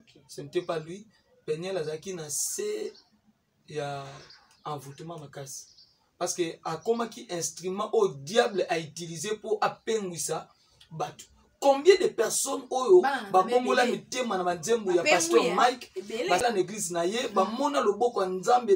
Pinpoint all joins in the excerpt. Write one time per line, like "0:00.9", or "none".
0:16.5